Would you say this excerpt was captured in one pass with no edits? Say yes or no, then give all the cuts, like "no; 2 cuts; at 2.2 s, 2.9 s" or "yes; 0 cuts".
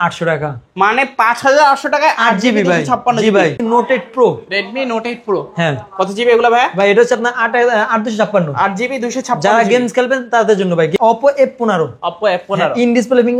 no; 2 cuts; at 3.6 s, 10.9 s